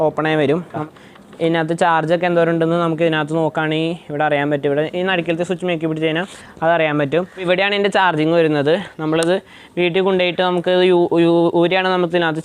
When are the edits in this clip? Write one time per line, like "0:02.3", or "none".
0:00.8
0:07.4